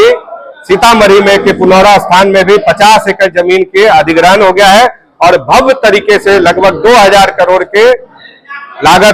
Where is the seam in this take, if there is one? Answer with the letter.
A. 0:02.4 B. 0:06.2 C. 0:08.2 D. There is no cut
D